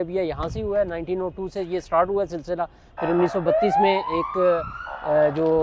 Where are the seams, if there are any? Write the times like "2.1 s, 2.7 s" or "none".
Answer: none